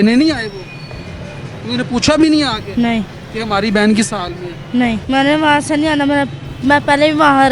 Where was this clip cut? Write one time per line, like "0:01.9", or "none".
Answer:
0:05.0